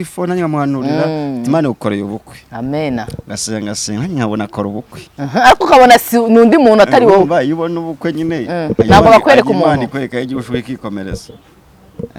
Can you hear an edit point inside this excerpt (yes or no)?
no